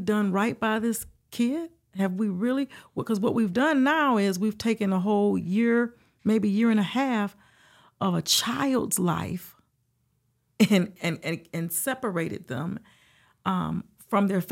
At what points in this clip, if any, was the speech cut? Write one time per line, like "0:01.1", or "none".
none